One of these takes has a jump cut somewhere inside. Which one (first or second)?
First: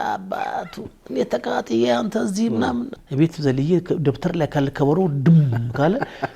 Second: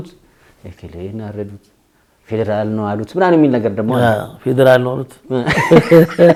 first